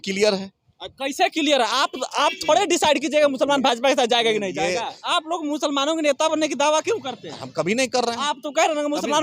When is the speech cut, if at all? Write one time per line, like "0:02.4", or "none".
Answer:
0:05.0